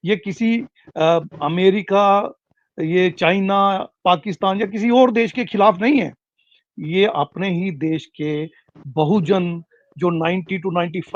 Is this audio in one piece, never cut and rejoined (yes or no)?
yes